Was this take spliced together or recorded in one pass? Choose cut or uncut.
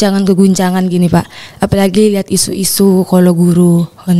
uncut